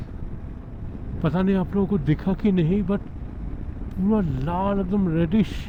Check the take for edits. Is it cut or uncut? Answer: uncut